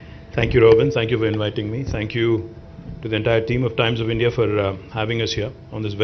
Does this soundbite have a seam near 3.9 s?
yes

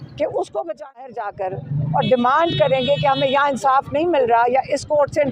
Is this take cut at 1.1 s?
yes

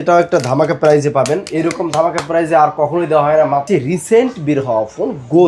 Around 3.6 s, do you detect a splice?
yes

